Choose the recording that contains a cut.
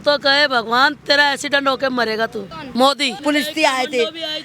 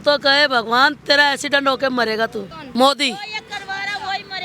first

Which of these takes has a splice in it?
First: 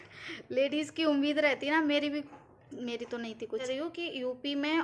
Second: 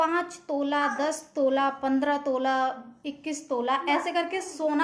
first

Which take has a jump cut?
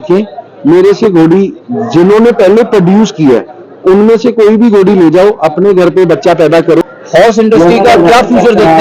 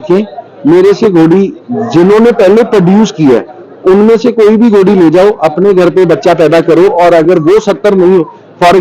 first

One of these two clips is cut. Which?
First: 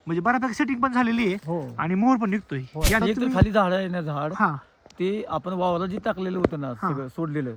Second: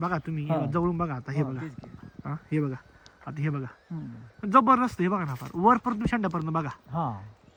first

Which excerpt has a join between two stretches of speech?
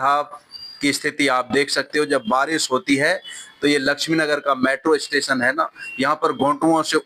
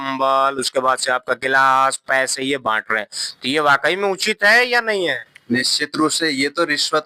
second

